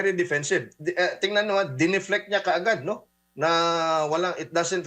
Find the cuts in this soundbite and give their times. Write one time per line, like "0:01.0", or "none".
none